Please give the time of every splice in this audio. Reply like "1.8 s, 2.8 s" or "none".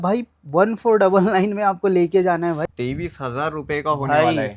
2.6 s